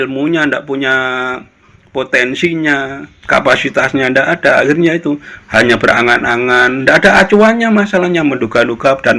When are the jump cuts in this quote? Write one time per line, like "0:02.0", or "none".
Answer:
none